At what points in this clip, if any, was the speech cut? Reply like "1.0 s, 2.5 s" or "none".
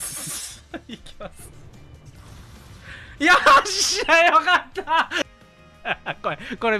5.2 s

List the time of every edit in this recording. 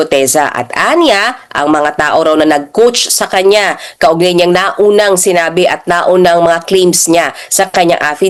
none

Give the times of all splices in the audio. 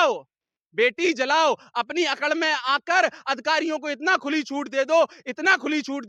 none

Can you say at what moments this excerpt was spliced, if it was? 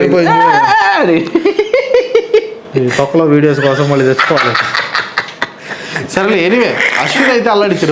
none

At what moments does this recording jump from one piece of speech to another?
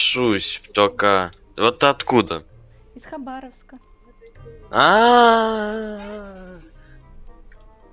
none

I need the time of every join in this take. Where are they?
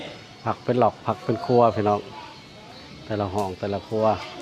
none

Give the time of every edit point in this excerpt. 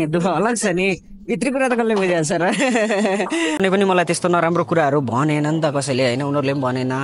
3.6 s

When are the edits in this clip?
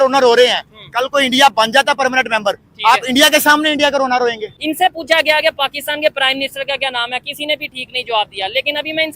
4.5 s

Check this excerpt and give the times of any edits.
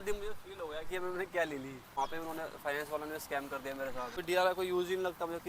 1.9 s, 4.1 s

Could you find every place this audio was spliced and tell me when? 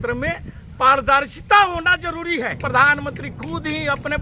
2.6 s

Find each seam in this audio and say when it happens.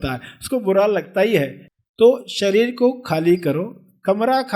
1.6 s

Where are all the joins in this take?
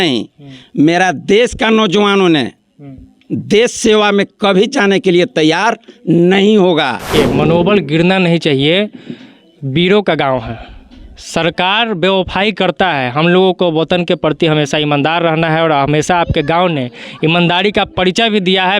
7.1 s

